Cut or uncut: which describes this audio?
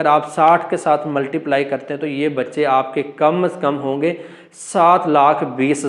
uncut